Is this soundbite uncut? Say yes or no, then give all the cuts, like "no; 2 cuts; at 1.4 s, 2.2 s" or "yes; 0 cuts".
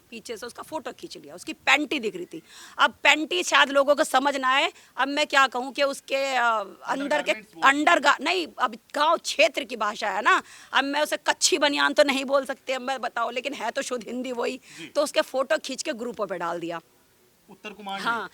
yes; 0 cuts